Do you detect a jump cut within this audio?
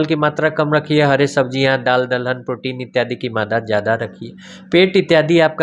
no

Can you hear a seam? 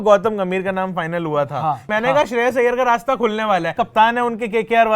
yes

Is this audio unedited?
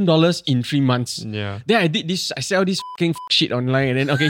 yes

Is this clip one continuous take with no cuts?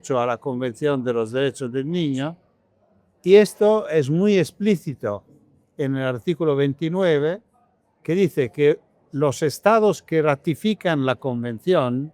yes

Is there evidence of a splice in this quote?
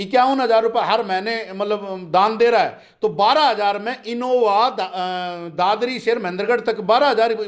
no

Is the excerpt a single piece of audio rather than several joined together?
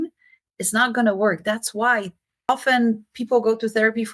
no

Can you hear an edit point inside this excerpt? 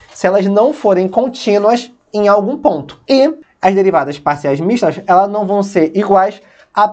yes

